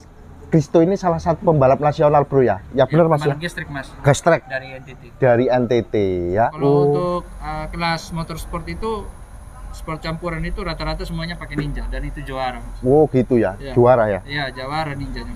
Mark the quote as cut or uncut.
cut